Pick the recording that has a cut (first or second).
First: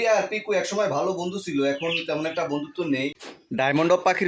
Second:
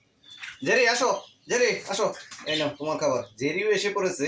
first